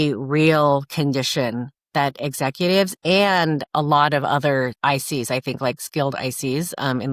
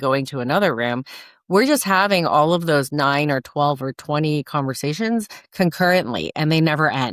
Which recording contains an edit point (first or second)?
first